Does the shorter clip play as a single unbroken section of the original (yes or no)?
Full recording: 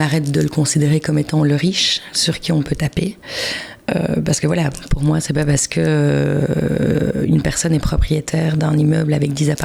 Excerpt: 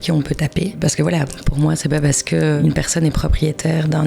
no